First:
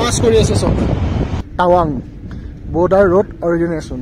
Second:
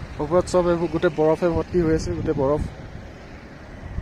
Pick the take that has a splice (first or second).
first